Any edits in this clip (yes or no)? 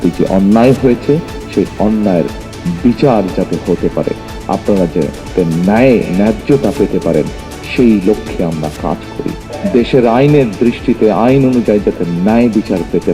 no